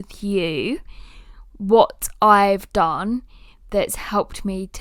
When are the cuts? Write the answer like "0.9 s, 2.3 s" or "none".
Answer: none